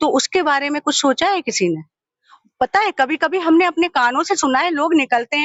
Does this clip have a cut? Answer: no; 0 cuts

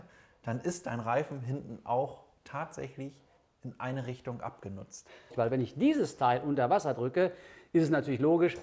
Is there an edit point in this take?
yes; 1 cut; at 5.3 s

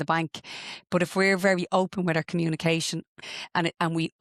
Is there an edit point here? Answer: yes; 1 cut; at 3.2 s

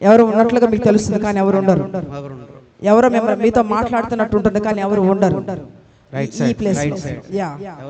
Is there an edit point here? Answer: yes; 1 cut; at 6.0 s

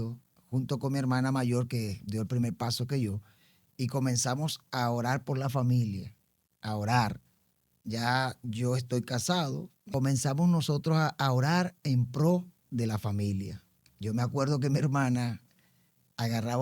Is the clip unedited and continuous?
no; 1 cut; at 9.7 s

